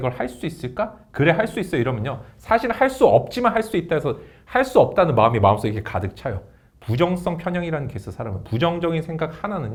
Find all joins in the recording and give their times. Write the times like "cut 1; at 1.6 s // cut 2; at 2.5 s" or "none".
none